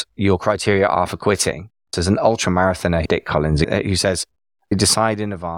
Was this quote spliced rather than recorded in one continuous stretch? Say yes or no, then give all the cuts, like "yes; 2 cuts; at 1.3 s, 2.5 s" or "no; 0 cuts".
yes; 1 cut; at 1.9 s